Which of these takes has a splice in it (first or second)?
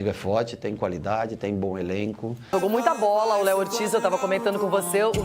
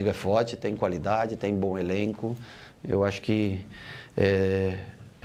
first